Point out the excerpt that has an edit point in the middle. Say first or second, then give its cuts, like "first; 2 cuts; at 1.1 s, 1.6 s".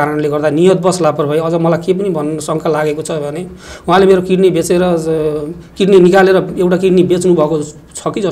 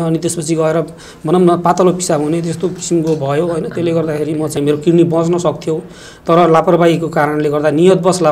second; 1 cut; at 4.5 s